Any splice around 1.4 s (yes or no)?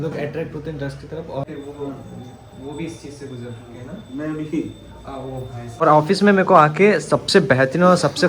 yes